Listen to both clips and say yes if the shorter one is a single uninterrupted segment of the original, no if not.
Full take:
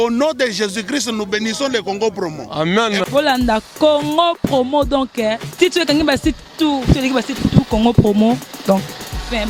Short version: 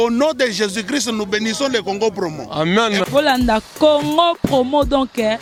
yes